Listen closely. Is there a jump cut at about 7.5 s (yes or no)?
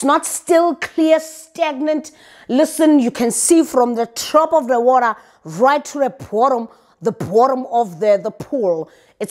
no